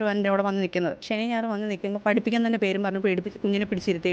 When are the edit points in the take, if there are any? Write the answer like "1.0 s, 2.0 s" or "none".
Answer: none